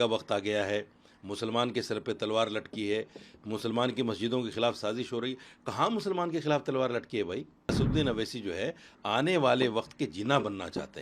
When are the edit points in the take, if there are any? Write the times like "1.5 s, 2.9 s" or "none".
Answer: 7.8 s